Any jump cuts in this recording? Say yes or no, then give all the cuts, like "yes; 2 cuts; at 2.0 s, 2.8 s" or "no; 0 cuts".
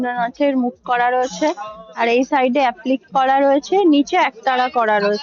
no; 0 cuts